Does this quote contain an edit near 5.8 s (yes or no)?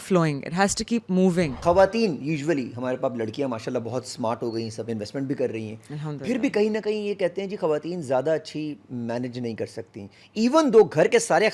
no